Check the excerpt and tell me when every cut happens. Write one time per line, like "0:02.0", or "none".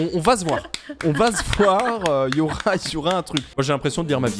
0:03.5